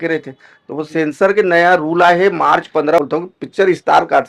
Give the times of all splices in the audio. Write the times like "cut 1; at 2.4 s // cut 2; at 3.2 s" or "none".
cut 1; at 3.0 s